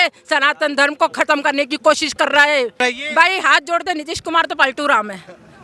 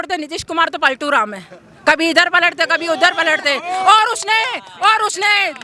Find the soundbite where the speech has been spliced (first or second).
first